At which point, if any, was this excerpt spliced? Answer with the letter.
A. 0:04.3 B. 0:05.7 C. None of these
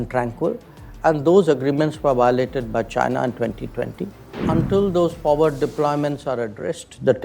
A